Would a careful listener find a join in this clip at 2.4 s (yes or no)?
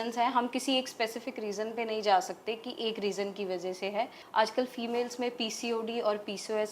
no